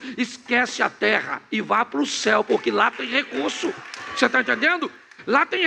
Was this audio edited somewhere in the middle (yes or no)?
no